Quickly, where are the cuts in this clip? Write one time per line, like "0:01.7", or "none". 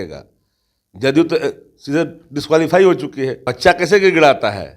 0:03.4